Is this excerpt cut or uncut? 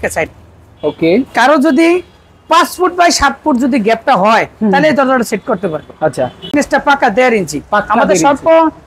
cut